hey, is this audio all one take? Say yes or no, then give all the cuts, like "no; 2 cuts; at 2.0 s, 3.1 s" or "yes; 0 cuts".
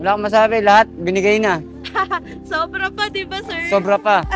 yes; 0 cuts